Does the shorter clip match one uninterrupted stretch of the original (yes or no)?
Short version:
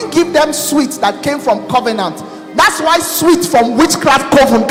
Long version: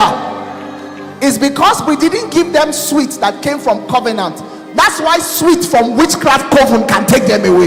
yes